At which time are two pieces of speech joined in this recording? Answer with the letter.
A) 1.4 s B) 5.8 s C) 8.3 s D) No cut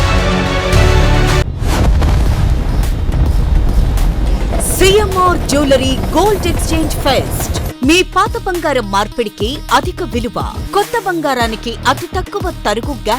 A